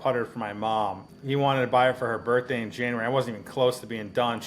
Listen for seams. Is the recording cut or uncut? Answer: cut